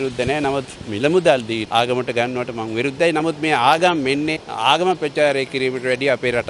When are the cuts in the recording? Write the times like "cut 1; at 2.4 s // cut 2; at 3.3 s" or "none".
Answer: cut 1; at 1.6 s // cut 2; at 4.5 s